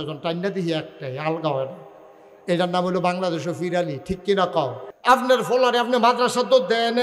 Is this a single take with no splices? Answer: no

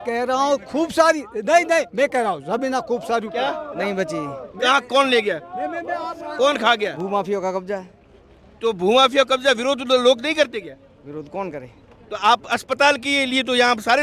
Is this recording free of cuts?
yes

